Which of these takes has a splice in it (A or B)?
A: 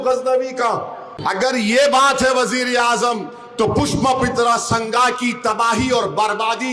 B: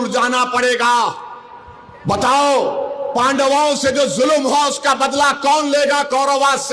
A